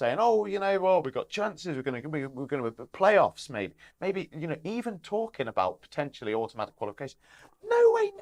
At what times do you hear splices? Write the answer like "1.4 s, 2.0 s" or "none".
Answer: none